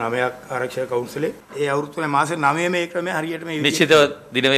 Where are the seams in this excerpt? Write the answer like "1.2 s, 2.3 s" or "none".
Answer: 1.4 s